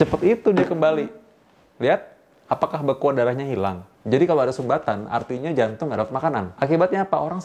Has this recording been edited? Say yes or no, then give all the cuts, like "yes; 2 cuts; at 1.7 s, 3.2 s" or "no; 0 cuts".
yes; 2 cuts; at 3.9 s, 6.5 s